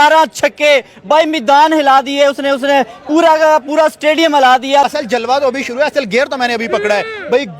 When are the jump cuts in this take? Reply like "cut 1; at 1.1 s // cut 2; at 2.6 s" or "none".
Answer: cut 1; at 4.9 s

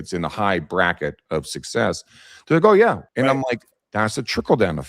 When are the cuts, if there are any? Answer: cut 1; at 3.0 s

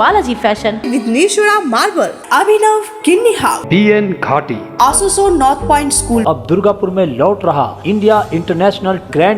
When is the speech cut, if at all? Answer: cut 1; at 6.2 s

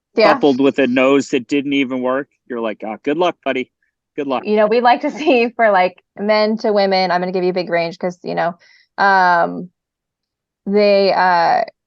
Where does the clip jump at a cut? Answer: cut 1; at 4.4 s

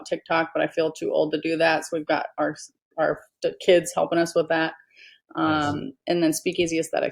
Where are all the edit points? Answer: none

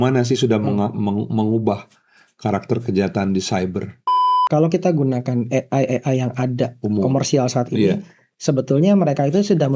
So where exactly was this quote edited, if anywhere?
cut 1; at 4.4 s

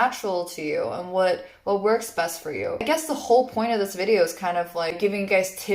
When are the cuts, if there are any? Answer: cut 1; at 2.8 s // cut 2; at 5.0 s

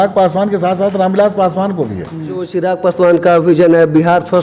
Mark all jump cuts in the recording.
cut 1; at 2.5 s

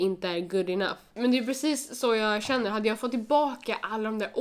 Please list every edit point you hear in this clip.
cut 1; at 1.0 s

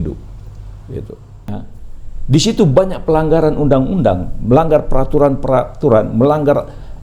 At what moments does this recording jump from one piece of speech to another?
cut 1; at 1.6 s

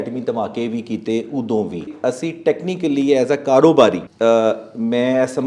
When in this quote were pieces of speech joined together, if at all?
cut 1; at 1.9 s // cut 2; at 4.1 s

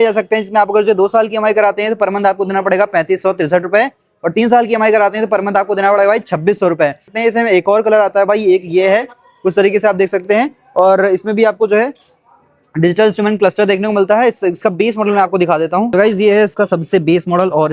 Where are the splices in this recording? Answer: cut 1; at 7.1 s

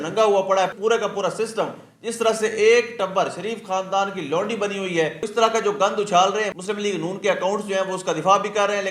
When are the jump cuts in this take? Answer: cut 1; at 5.2 s

